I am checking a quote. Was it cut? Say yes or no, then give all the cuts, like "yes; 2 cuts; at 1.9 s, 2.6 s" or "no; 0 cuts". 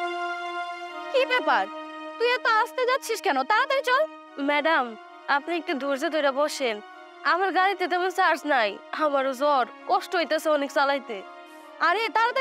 yes; 1 cut; at 1.1 s